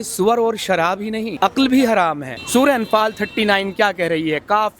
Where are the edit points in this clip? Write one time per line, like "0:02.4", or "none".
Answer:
0:01.3
0:02.3